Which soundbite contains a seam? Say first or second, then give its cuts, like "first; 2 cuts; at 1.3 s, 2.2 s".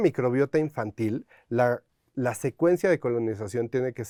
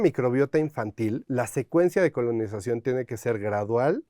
second; 1 cut; at 1.2 s